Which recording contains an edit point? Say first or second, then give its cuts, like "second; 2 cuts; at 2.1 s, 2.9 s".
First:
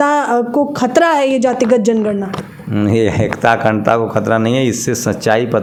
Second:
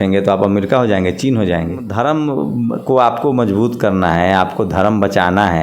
second; 1 cut; at 1.9 s